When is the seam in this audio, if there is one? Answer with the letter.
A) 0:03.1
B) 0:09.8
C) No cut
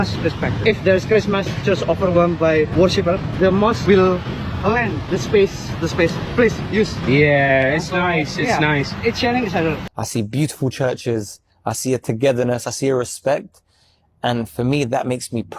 B